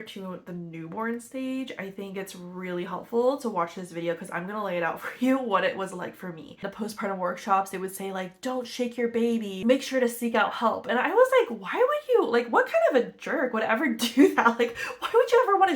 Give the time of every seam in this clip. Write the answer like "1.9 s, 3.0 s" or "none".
6.6 s, 9.5 s